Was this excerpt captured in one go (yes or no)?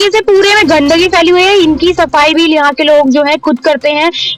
yes